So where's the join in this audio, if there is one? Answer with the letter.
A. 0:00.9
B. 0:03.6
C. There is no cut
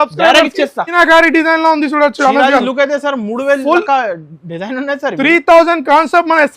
A